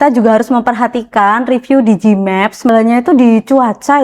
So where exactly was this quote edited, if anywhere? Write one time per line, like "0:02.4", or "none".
0:02.7